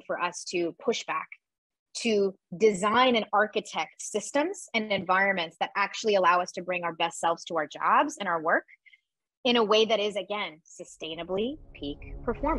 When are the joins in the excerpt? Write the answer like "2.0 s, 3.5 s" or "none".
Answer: none